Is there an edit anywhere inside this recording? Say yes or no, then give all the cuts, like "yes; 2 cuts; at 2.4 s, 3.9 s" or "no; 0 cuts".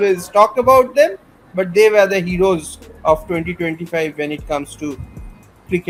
no; 0 cuts